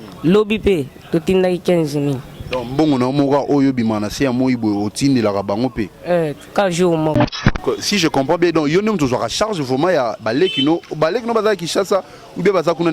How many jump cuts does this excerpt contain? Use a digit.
1